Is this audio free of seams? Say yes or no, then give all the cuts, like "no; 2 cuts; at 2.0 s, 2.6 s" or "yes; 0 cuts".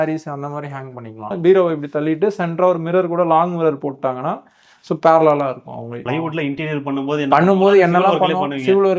no; 2 cuts; at 1.4 s, 5.9 s